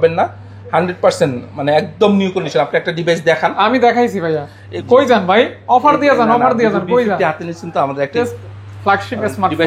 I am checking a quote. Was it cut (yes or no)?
yes